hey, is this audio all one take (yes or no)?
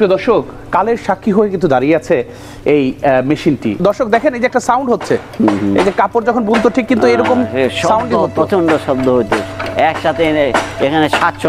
no